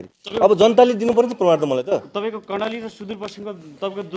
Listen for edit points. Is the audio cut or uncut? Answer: uncut